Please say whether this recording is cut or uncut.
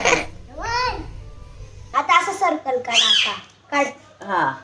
cut